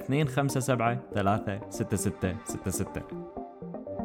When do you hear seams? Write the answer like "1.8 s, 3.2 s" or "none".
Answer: 2.9 s